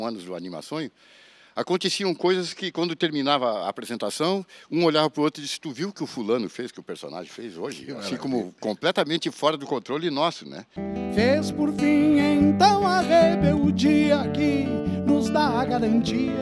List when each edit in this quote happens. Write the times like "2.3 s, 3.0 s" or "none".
10.8 s